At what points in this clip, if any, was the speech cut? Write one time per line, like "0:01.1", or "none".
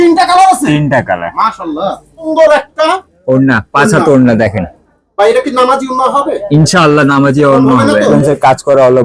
0:02.3
0:08.1